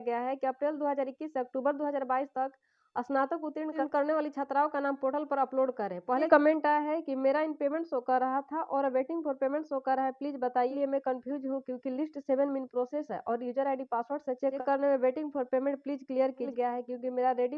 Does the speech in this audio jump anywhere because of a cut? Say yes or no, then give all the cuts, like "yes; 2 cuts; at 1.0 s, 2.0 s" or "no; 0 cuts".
yes; 3 cuts; at 6.3 s, 10.7 s, 16.5 s